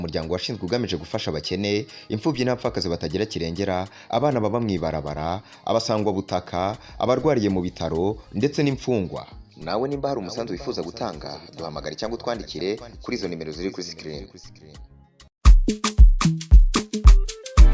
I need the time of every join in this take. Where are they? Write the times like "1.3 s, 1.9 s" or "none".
none